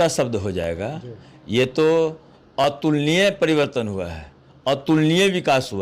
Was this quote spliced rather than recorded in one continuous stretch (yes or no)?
no